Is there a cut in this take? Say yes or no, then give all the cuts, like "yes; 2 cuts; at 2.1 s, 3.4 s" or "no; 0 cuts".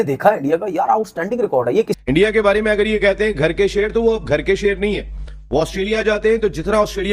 yes; 1 cut; at 1.9 s